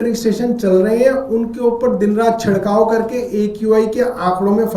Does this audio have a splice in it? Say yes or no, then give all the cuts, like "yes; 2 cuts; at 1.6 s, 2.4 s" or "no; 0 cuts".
no; 0 cuts